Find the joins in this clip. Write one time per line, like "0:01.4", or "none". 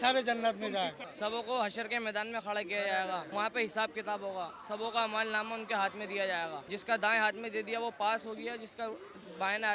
0:01.0
0:03.3
0:06.7